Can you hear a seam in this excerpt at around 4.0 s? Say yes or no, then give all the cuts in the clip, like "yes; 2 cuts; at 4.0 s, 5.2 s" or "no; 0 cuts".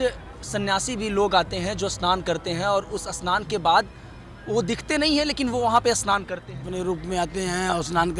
no; 1 cut; at 6.7 s